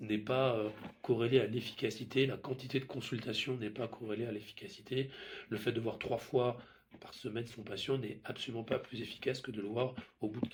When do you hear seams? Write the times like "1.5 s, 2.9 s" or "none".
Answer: none